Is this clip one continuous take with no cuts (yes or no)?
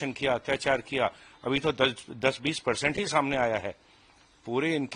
yes